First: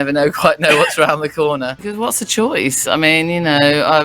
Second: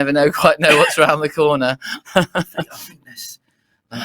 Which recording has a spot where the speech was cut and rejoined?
first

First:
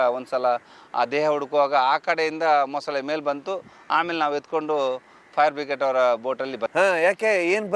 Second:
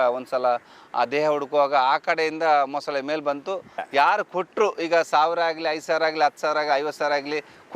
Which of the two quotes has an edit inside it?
second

